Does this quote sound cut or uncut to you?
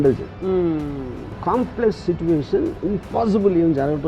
cut